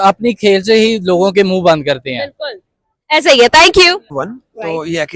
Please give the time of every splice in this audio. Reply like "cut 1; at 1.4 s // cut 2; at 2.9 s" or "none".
cut 1; at 4.2 s